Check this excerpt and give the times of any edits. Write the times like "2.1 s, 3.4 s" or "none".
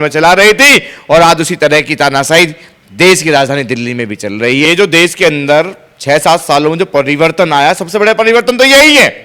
4.6 s